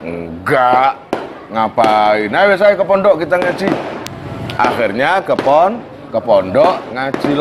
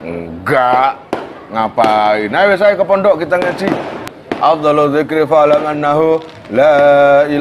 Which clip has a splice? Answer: second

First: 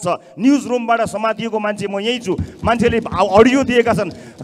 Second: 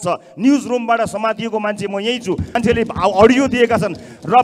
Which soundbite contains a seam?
second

